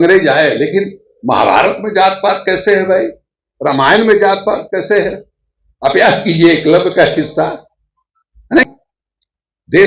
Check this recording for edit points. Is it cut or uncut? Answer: cut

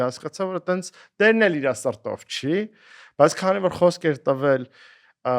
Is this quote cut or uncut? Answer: uncut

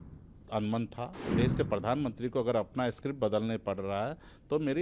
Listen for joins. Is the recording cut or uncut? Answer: cut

